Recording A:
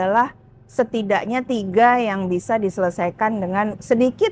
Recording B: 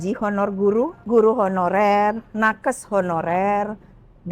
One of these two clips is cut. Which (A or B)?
B